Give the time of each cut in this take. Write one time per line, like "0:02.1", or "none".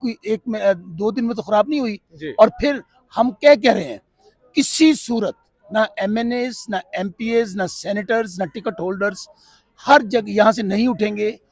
none